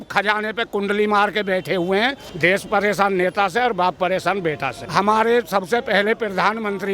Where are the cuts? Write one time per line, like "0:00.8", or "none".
0:02.2
0:04.8